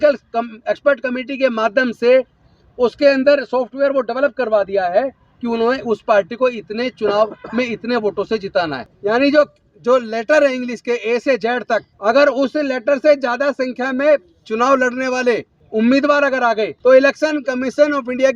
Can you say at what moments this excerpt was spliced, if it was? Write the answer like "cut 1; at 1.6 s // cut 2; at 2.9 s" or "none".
cut 1; at 8.8 s // cut 2; at 11.9 s // cut 3; at 15.6 s // cut 4; at 16.7 s